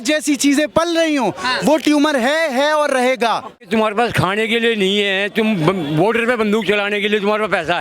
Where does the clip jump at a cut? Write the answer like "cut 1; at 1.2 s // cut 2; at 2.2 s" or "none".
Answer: cut 1; at 3.6 s